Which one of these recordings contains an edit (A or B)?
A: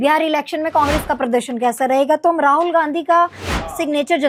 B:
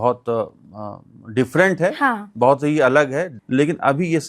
B